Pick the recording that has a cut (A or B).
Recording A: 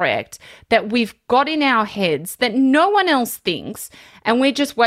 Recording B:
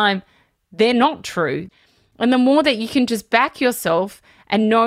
B